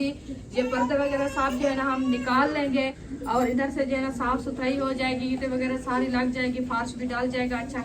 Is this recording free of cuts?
no; 1 cut; at 3.1 s

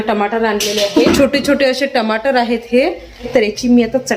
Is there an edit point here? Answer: yes; 2 cuts; at 1.0 s, 3.3 s

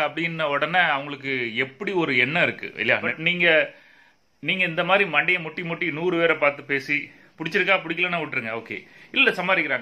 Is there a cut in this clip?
yes; 1 cut; at 3.1 s

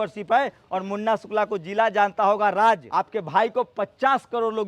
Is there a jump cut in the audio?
yes; 1 cut; at 2.9 s

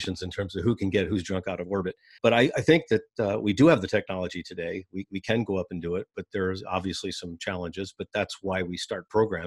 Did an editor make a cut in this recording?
yes; 1 cut; at 2.1 s

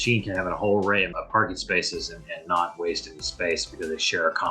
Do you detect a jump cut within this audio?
no; 0 cuts

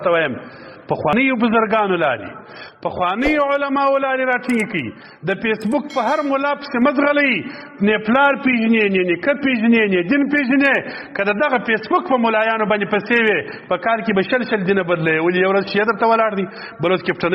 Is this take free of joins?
no; 1 cut; at 1.1 s

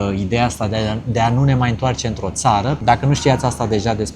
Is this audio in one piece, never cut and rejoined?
no; 1 cut; at 2.8 s

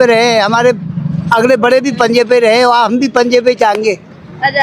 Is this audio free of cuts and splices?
yes; 0 cuts

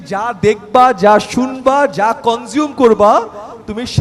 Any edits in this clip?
no; 0 cuts

